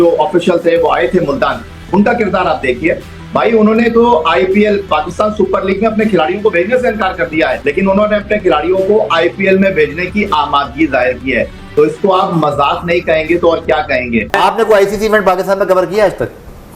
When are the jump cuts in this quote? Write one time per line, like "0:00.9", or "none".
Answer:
0:14.3